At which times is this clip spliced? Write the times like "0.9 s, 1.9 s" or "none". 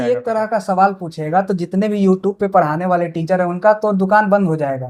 none